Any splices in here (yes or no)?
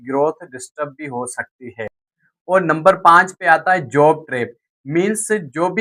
no